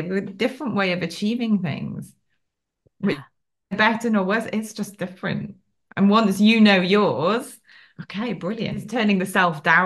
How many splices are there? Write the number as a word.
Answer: one